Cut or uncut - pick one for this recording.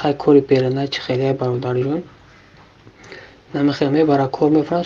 uncut